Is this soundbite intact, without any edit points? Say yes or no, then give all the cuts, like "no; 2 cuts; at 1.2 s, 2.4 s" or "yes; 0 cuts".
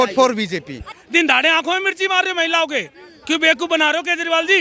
no; 1 cut; at 1.0 s